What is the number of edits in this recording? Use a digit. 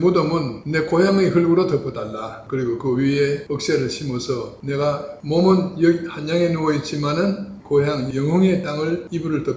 1